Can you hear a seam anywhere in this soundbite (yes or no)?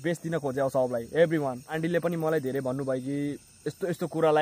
yes